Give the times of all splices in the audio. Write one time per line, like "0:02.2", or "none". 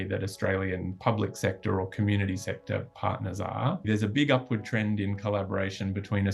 0:03.9

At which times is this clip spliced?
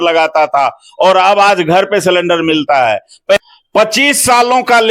0:03.4

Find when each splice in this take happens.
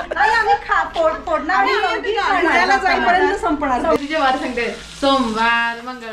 0:04.0

